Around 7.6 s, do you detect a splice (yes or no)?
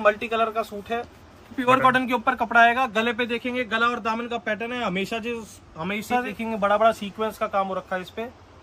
no